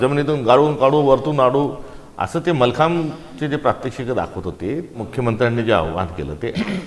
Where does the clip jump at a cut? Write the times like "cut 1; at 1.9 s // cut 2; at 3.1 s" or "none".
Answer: cut 1; at 5.1 s